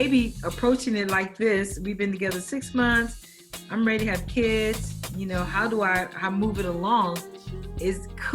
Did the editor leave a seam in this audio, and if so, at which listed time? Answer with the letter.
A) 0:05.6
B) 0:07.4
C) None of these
C